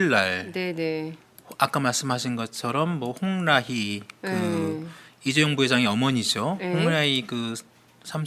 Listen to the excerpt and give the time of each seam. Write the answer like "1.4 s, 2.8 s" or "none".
2.2 s